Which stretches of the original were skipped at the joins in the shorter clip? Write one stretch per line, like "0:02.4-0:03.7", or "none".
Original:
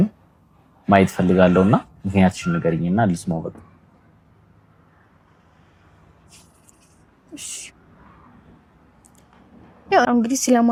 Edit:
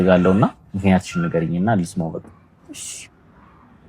0:03.9-0:07.2